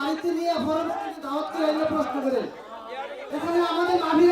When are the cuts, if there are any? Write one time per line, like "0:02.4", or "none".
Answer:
0:03.2